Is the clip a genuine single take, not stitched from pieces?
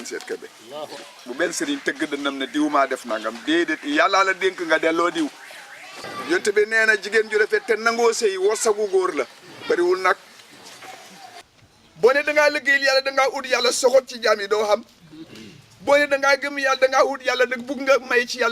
no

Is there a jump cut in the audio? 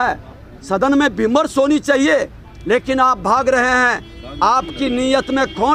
no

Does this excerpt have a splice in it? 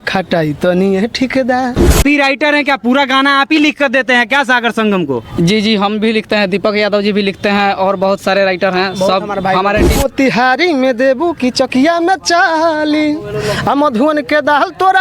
yes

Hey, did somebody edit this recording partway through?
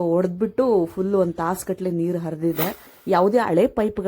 yes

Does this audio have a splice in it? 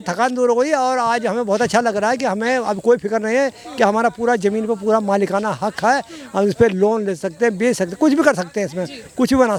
no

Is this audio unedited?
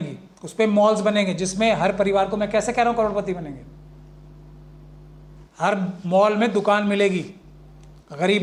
yes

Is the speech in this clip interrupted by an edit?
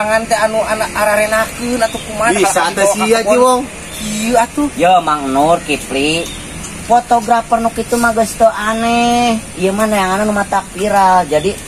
no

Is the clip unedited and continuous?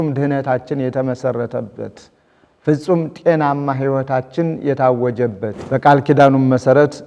no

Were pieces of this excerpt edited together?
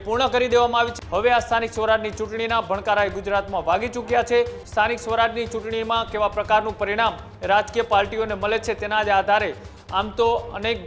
yes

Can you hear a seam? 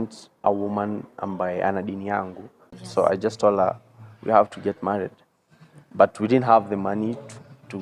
yes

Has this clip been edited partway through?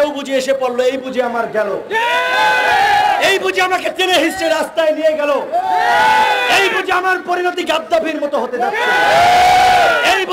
no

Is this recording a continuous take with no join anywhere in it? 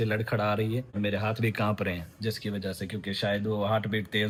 yes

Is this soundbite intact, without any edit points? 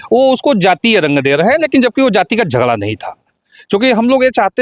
yes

